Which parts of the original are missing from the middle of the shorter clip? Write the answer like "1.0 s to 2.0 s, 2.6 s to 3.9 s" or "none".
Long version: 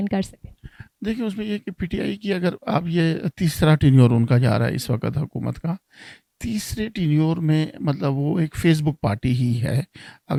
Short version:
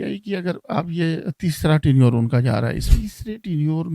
4.8 s to 6.3 s